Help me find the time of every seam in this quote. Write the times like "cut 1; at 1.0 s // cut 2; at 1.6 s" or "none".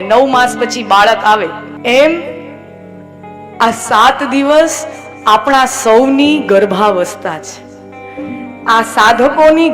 cut 1; at 1.7 s